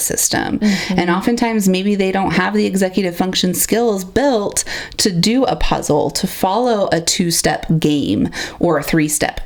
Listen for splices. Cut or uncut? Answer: uncut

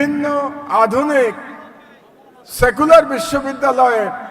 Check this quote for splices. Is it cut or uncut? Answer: uncut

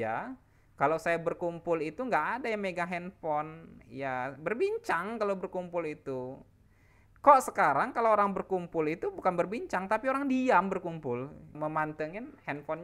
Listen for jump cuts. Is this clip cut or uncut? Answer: cut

